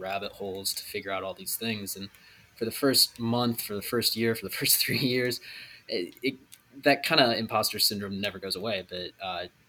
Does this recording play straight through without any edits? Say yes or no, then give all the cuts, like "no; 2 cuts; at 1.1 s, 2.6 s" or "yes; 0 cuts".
yes; 0 cuts